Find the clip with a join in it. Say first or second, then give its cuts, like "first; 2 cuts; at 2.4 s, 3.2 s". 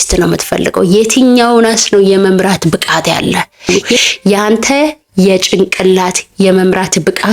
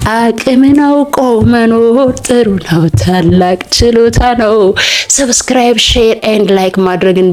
first; 1 cut; at 3.8 s